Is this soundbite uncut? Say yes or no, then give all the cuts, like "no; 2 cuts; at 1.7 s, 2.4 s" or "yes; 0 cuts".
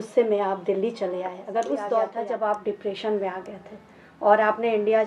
no; 1 cut; at 2.2 s